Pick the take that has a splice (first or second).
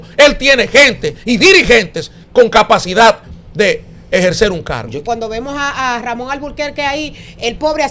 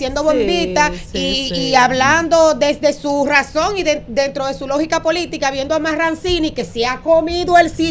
first